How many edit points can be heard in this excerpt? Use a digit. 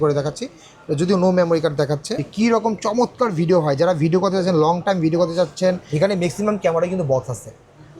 2